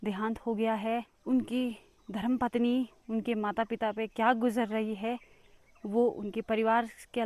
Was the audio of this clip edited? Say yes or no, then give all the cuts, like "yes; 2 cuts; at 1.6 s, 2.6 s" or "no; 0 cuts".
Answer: yes; 1 cut; at 1.1 s